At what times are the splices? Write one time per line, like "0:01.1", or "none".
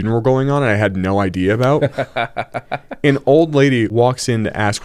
0:03.9